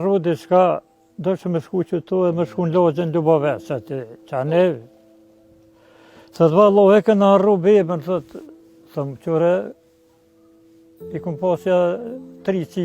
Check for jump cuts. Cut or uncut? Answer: uncut